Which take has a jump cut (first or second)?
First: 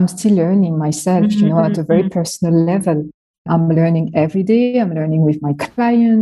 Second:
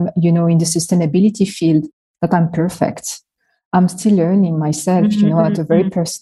first